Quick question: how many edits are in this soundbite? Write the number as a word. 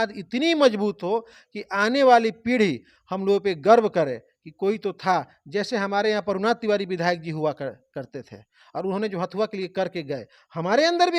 zero